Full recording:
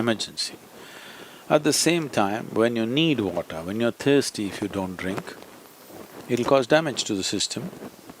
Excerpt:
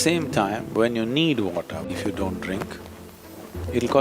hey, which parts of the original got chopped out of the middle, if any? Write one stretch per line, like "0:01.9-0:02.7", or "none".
0:03.7-0:04.4